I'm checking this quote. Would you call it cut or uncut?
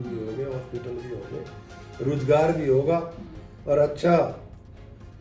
uncut